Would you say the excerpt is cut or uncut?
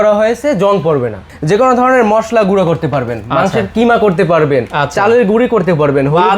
cut